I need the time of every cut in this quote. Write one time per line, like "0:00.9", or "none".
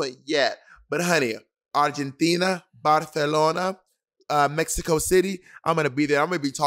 none